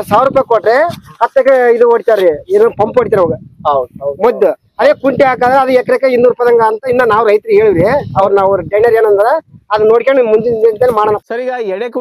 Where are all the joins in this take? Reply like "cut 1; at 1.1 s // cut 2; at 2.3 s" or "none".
cut 1; at 11.0 s